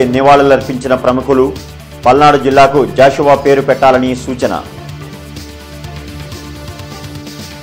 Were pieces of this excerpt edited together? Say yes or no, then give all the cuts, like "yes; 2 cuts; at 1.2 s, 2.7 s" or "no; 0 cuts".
no; 0 cuts